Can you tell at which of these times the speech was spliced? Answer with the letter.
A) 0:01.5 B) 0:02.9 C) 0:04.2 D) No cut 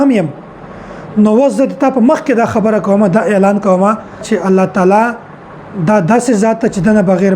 C